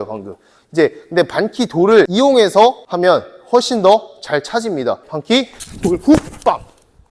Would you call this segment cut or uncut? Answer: cut